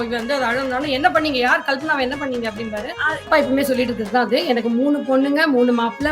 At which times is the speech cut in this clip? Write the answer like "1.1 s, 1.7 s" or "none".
3.2 s